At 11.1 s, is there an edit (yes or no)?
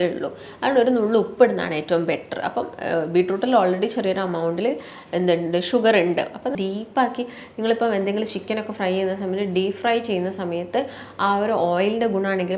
no